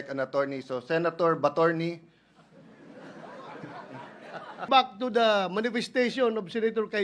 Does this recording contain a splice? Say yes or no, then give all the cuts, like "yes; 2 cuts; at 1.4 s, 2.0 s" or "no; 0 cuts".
yes; 1 cut; at 4.7 s